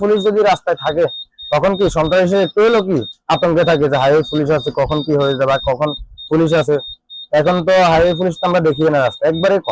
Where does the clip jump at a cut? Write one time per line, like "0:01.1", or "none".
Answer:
none